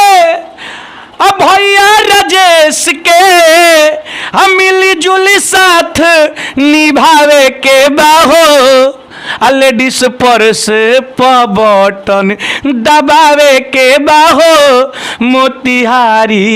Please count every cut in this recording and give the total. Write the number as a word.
zero